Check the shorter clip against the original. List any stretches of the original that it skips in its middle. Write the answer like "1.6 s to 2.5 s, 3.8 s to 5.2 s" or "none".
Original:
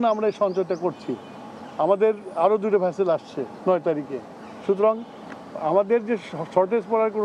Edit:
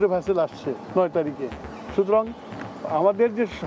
none